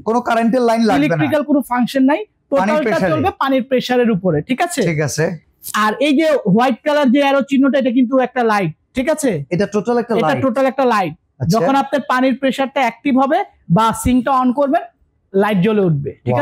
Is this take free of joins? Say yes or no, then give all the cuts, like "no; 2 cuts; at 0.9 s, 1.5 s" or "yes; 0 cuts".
yes; 0 cuts